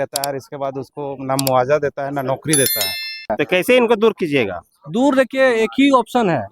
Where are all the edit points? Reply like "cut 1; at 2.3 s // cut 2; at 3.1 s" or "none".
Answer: cut 1; at 3.3 s